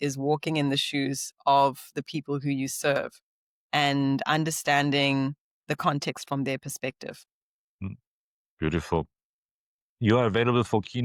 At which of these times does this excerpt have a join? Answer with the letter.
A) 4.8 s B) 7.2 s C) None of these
C